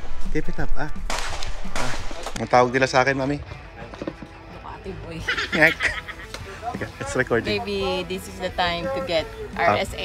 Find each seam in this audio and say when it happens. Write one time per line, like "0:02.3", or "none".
0:06.1